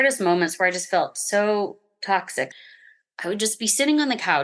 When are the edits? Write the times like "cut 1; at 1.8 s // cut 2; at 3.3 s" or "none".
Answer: cut 1; at 2.5 s